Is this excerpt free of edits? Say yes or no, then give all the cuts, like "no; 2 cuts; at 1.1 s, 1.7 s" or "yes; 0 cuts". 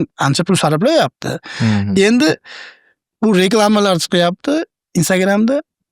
yes; 0 cuts